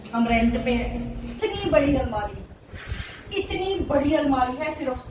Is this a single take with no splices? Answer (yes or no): no